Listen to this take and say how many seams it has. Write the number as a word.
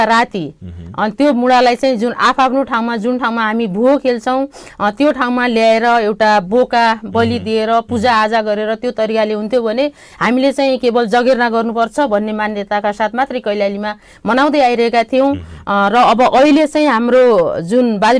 zero